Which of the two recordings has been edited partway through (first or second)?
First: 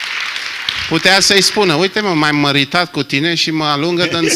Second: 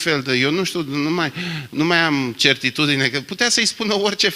first